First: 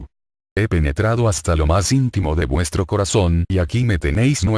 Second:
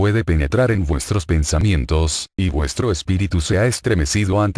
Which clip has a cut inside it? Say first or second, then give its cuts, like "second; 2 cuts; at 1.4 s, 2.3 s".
first; 1 cut; at 2.4 s